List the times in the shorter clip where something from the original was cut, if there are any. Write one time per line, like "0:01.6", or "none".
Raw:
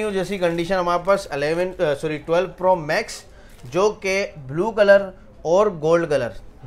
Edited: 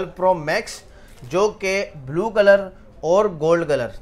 none